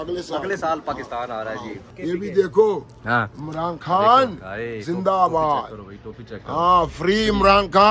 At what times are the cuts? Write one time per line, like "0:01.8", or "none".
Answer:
0:01.9